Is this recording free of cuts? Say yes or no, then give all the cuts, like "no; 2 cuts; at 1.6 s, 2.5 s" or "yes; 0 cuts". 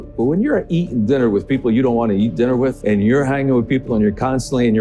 no; 1 cut; at 2.8 s